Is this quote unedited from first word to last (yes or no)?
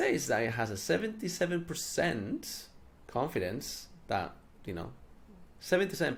yes